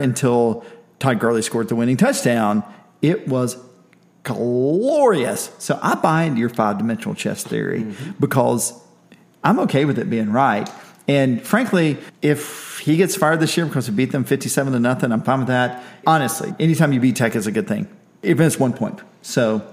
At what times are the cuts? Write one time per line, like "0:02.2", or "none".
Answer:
0:12.1
0:16.0
0:18.2